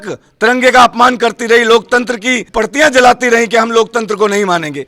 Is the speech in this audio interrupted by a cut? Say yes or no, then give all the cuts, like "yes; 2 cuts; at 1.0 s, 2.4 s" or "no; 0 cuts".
yes; 1 cut; at 2.4 s